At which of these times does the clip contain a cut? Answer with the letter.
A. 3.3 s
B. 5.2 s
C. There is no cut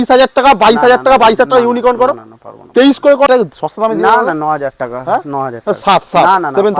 A